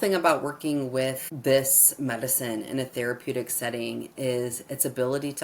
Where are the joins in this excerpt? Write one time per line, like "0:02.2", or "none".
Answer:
0:01.3